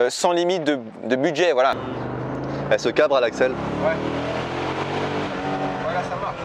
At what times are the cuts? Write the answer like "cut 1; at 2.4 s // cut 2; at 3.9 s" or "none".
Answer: cut 1; at 1.8 s